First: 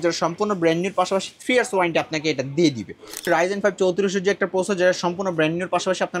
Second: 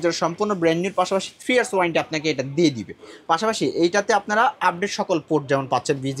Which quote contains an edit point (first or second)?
first